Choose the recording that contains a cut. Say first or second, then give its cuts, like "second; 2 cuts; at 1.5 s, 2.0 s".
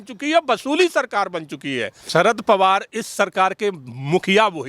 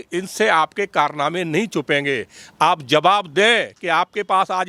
first; 1 cut; at 1.9 s